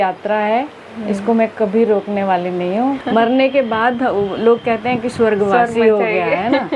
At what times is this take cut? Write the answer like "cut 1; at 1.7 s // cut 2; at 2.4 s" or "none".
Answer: cut 1; at 3.0 s